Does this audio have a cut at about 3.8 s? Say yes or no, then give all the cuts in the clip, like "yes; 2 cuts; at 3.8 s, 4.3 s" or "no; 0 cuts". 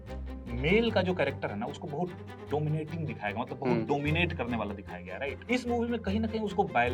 no; 2 cuts; at 2.3 s, 5.4 s